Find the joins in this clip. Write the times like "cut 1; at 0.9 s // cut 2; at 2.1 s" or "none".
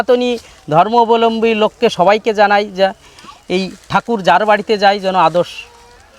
none